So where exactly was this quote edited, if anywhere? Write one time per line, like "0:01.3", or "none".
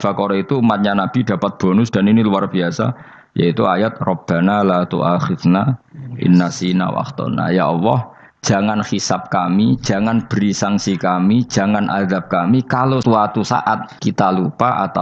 0:13.0
0:13.9

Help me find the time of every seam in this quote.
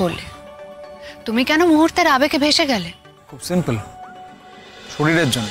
none

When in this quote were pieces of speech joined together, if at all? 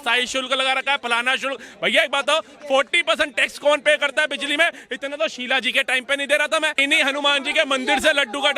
0:06.8

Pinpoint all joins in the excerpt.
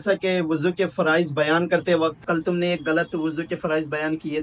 0:02.2

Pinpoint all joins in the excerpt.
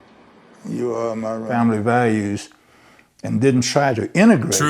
0:01.5

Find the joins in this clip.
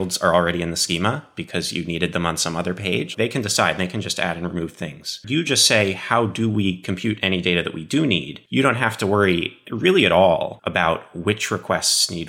0:03.1
0:05.2
0:08.4
0:10.6

